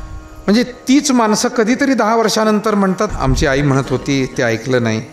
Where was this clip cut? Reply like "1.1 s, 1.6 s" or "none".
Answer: 3.1 s